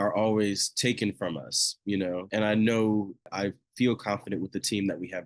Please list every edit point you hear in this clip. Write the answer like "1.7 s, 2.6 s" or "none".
2.3 s, 3.3 s